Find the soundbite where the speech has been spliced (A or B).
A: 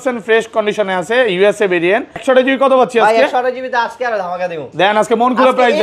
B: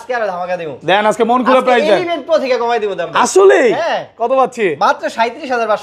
A